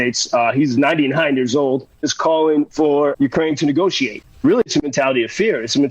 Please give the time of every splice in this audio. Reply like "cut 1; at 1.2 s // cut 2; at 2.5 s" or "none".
cut 1; at 2.1 s // cut 2; at 3.1 s // cut 3; at 4.2 s